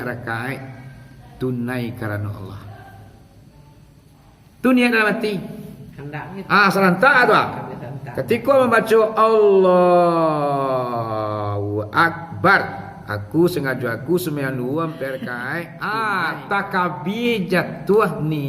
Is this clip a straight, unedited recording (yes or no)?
no